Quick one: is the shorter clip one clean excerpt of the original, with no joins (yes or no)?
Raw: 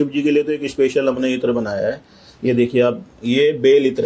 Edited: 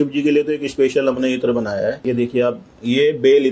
no